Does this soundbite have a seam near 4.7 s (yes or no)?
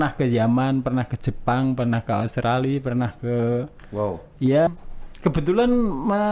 yes